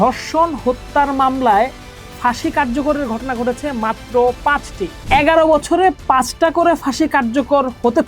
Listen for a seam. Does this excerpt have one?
yes; 1 cut; at 5.0 s

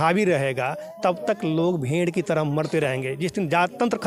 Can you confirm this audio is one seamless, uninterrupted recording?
yes; 0 cuts

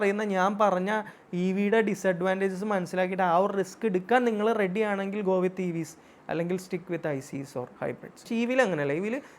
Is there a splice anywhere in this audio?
yes; 1 cut; at 8.2 s

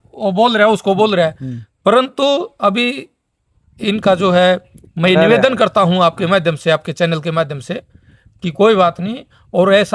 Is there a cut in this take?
no; 0 cuts

